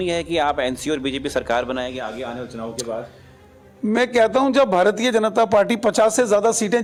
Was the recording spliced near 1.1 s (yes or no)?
no